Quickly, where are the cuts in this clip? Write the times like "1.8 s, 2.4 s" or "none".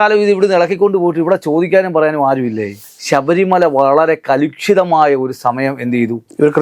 2.8 s